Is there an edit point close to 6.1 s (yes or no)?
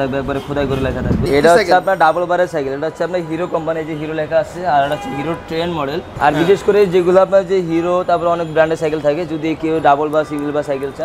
yes